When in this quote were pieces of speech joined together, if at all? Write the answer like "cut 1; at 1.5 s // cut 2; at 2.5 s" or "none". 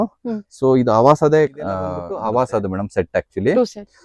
cut 1; at 2.0 s